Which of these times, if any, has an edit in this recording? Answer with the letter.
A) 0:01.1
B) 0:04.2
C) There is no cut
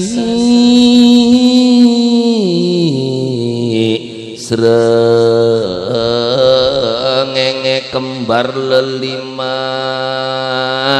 C